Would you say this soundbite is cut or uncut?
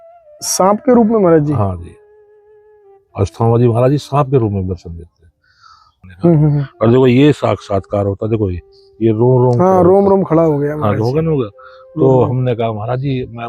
cut